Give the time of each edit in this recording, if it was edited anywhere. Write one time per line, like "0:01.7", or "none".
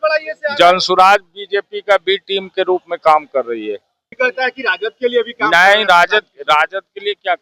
0:04.2